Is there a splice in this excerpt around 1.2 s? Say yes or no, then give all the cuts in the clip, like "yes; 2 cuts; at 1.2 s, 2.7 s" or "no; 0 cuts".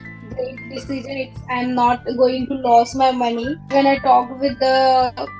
no; 1 cut; at 3.6 s